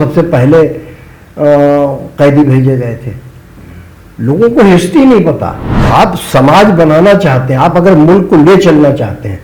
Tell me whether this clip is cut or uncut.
cut